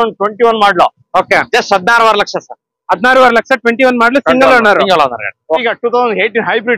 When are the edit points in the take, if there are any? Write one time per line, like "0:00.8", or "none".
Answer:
0:05.7